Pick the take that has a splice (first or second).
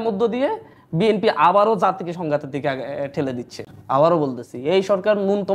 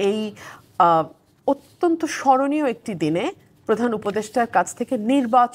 first